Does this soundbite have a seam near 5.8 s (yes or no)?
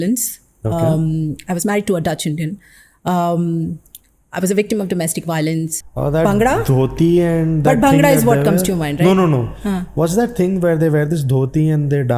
yes